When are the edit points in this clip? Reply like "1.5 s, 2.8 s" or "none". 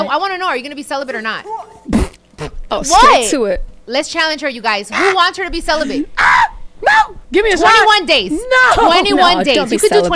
2.3 s, 6.7 s